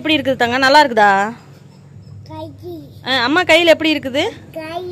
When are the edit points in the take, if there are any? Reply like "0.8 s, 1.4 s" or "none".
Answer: none